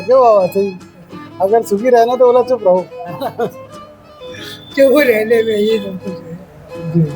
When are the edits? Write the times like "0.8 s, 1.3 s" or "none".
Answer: none